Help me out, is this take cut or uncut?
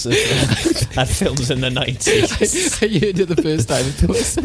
uncut